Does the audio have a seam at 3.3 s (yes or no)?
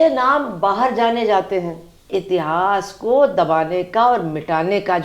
no